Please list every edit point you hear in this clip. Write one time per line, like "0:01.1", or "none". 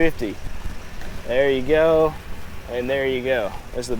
none